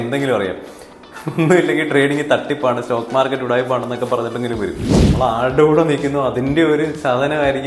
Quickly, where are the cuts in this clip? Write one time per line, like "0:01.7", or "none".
0:05.1